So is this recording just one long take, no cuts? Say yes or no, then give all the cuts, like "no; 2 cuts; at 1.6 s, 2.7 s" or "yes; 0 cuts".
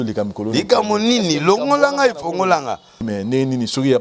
no; 1 cut; at 3.0 s